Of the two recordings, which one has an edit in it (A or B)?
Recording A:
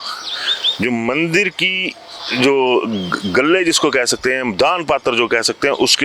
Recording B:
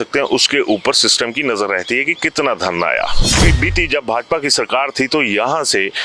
B